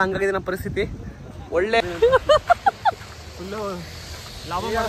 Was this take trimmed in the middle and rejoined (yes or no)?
yes